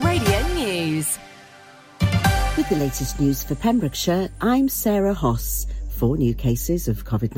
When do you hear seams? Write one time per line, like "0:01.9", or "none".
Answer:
0:02.5